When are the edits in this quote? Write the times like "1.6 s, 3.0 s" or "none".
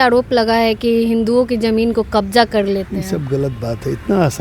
none